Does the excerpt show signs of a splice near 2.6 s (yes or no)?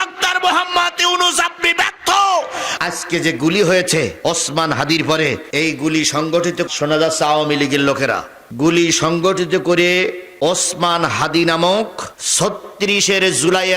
no